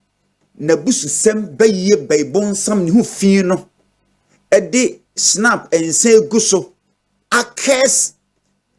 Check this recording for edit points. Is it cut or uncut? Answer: uncut